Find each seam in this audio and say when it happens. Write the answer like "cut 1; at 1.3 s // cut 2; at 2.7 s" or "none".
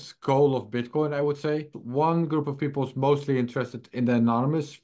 cut 1; at 1.7 s